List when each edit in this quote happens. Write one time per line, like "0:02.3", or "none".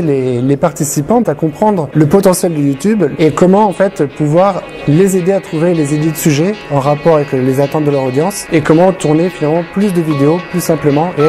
0:01.3
0:03.1
0:08.4